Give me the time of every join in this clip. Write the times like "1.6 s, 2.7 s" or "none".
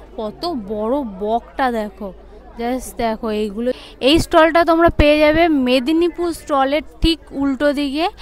3.8 s